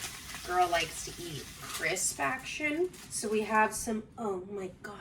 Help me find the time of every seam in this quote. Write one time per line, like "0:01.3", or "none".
0:01.7
0:03.1